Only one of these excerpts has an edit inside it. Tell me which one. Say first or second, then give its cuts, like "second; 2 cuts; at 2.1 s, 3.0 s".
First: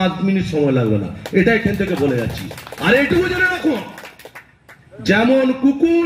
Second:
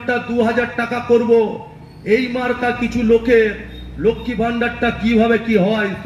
first; 1 cut; at 2.6 s